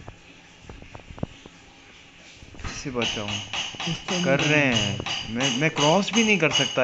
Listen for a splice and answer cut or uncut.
uncut